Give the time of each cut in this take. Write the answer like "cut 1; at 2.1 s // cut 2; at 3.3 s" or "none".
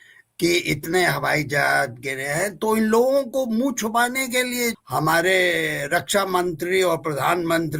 cut 1; at 4.8 s